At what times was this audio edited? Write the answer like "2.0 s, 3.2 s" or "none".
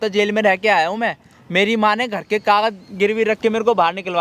none